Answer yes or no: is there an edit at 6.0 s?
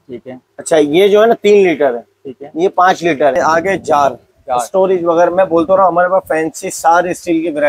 no